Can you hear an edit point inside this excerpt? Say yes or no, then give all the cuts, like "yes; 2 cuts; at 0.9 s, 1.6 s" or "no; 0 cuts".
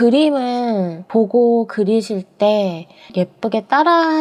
yes; 2 cuts; at 1.0 s, 3.0 s